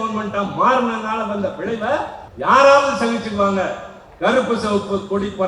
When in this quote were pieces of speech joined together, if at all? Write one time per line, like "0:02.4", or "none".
0:02.2